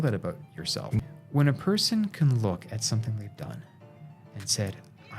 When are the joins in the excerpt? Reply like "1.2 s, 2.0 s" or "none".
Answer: 1.0 s